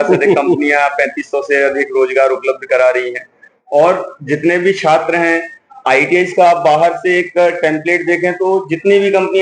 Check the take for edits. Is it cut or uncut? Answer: uncut